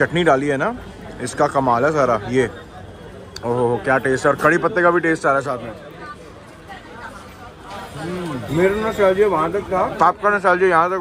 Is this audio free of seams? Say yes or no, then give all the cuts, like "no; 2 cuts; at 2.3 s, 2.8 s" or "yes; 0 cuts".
yes; 0 cuts